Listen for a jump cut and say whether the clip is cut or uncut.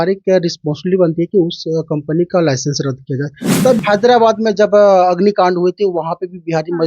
cut